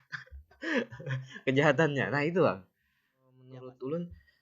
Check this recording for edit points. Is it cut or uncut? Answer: cut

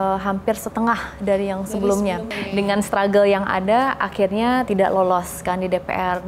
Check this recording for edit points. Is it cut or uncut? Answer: cut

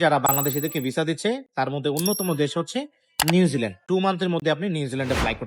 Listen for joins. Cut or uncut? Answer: cut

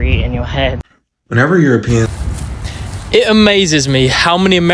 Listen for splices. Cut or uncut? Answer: cut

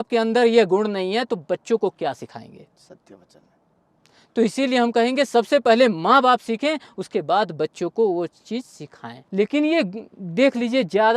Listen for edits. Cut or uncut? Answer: cut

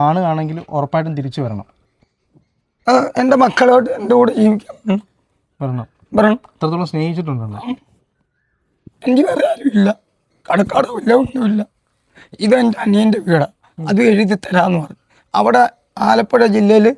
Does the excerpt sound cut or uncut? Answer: uncut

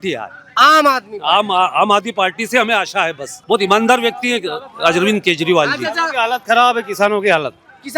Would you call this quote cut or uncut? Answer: cut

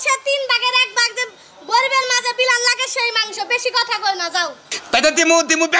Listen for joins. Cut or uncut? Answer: cut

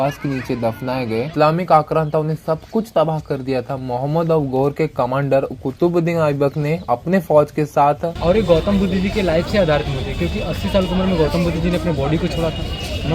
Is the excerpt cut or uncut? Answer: cut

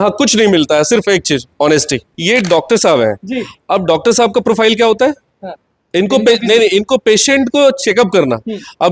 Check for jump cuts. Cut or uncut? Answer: cut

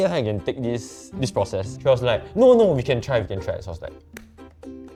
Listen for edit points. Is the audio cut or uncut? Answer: uncut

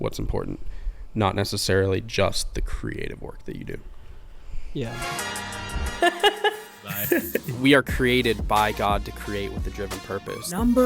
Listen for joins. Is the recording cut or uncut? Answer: cut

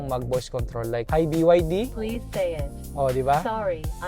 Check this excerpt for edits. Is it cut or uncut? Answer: cut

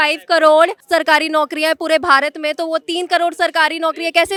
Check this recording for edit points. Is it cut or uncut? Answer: uncut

